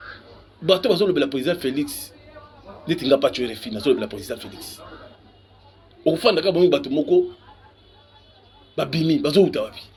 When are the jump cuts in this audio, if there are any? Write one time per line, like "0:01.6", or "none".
none